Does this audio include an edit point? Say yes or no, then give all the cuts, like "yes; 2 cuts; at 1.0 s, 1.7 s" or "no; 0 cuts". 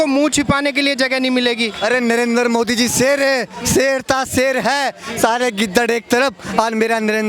no; 0 cuts